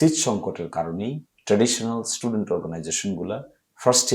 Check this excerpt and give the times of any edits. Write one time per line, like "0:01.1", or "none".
0:01.3